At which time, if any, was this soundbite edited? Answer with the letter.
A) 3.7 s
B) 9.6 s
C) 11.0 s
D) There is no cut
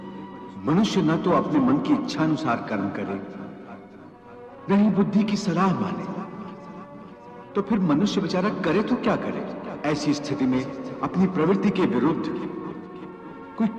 B